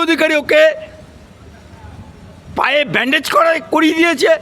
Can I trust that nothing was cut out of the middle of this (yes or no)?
yes